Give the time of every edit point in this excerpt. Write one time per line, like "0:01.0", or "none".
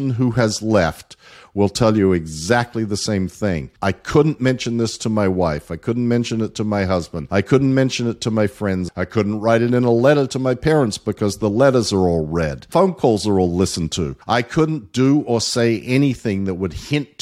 0:03.7
0:07.2
0:08.9
0:12.6
0:14.1